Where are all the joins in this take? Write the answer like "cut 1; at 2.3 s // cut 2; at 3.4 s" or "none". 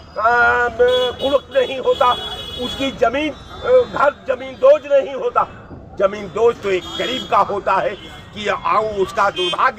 none